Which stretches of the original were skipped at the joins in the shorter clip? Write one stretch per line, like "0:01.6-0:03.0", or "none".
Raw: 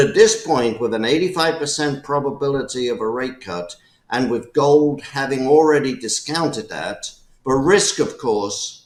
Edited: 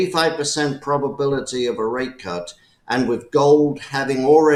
none